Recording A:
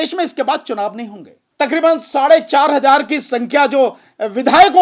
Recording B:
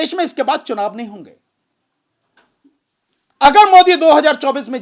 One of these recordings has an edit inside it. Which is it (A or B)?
A